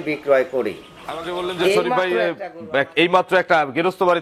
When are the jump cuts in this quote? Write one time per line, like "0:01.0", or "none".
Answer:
0:02.1